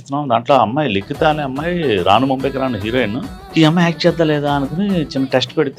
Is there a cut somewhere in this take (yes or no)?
yes